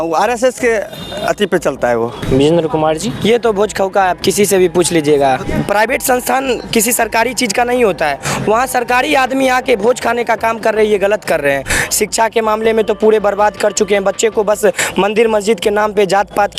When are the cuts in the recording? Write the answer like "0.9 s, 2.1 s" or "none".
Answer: 2.2 s, 5.4 s, 11.7 s